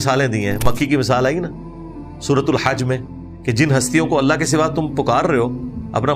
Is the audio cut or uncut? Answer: uncut